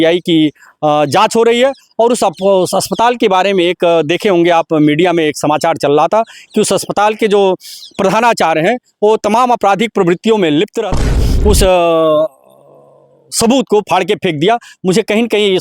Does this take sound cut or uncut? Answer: cut